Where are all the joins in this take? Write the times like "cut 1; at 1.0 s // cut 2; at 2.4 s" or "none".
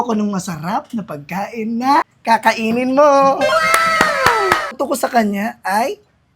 cut 1; at 2.1 s // cut 2; at 4.8 s